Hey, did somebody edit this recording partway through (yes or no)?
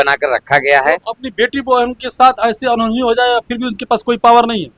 no